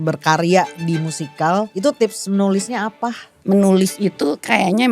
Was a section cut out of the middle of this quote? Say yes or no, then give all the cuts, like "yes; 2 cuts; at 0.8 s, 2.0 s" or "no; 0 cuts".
yes; 2 cuts; at 1.7 s, 3.3 s